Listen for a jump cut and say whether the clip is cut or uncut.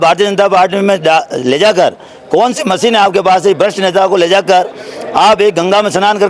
uncut